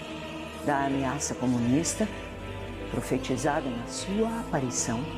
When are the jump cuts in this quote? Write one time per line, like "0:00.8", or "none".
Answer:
none

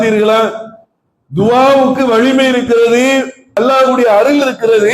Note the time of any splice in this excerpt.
0:03.6

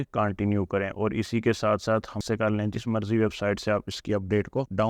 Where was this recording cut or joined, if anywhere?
0:02.2

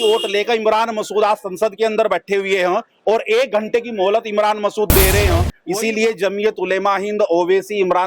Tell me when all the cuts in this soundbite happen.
0:05.6

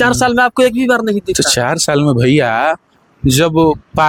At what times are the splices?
none

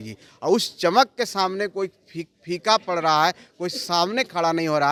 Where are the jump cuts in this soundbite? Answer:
none

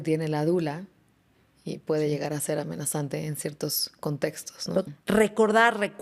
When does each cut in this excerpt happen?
0:04.9

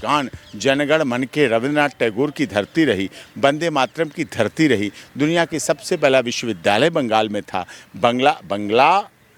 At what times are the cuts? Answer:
none

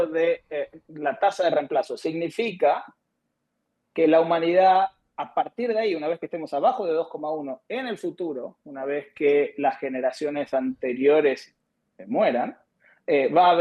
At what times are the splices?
none

